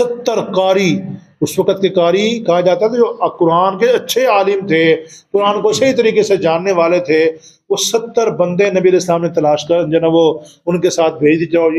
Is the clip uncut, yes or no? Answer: yes